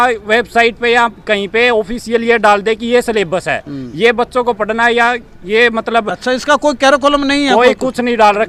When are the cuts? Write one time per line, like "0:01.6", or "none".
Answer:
none